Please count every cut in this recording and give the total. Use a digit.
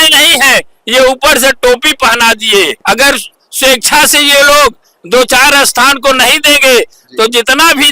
1